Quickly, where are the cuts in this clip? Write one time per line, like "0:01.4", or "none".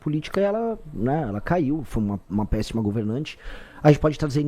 none